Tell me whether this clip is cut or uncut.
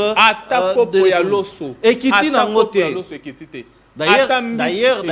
uncut